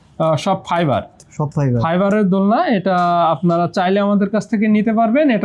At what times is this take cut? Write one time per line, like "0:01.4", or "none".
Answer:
none